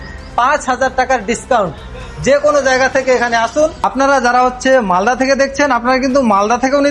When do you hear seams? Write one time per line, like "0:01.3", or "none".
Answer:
0:03.8